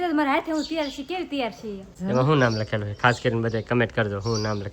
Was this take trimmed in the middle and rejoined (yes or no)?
yes